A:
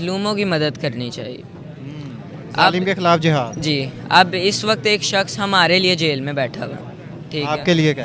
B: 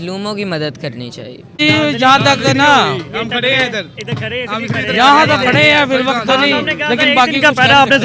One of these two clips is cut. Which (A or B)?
B